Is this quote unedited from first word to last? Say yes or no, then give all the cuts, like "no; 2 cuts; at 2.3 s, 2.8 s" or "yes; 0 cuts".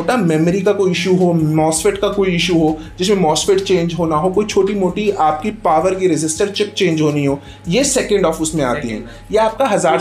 yes; 0 cuts